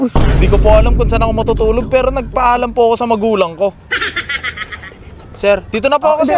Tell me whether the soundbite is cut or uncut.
uncut